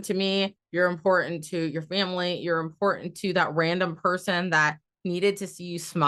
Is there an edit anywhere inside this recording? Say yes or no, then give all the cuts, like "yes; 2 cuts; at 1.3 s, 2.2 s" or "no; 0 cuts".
no; 0 cuts